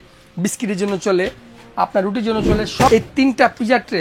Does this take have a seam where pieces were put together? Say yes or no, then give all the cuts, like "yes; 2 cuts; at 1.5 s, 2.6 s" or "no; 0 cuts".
yes; 1 cut; at 2.9 s